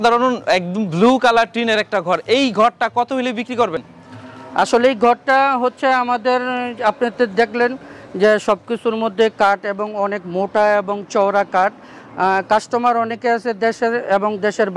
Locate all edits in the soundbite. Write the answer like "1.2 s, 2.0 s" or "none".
none